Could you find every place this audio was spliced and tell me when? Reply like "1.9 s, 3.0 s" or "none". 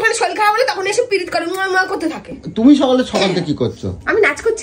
2.4 s